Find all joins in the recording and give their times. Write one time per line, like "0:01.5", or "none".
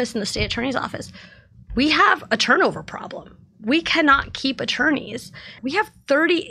0:05.6